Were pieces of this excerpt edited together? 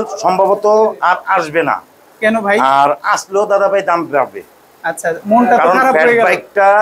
no; 0 cuts

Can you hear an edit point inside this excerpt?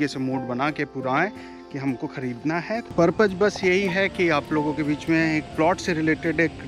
yes; 1 cut; at 2.9 s

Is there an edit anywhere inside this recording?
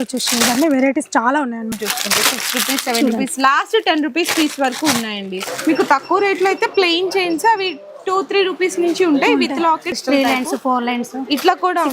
yes; 3 cuts; at 1.7 s, 5.5 s, 9.9 s

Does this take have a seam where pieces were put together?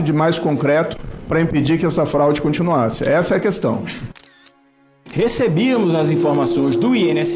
yes; 1 cut; at 4.4 s

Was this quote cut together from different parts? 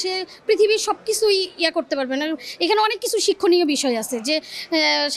no; 0 cuts

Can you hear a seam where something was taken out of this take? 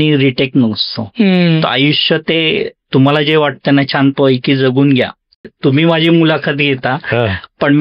yes; 1 cut; at 5.4 s

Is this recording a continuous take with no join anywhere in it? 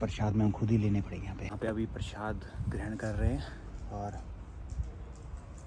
yes; 0 cuts

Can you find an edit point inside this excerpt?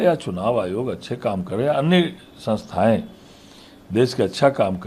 no; 0 cuts

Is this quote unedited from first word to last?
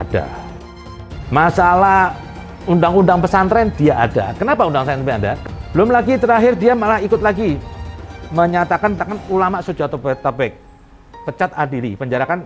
no; 2 cuts; at 5.4 s, 9.0 s

